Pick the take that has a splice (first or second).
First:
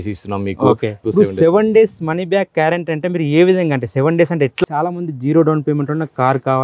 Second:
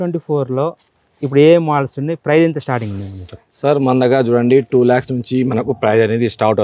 first